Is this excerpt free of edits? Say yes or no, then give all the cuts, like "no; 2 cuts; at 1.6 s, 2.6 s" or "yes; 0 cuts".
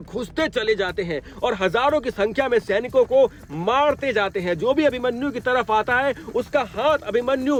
yes; 0 cuts